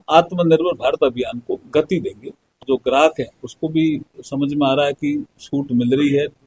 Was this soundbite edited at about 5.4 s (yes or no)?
no